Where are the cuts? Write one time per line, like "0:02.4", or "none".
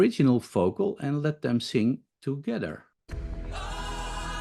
0:03.0